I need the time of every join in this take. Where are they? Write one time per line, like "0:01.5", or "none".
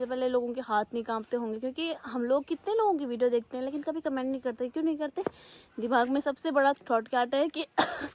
none